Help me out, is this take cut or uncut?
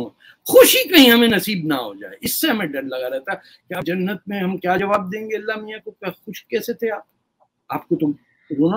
uncut